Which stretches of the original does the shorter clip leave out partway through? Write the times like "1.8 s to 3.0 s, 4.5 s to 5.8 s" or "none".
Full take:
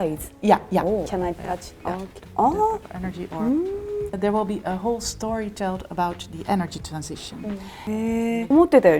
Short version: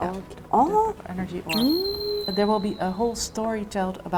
none